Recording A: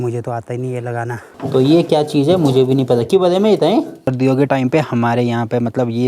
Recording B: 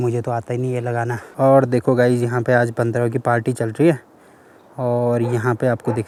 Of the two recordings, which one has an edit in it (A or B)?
A